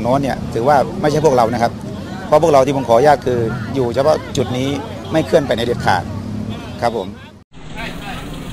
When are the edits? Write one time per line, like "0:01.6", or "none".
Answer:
none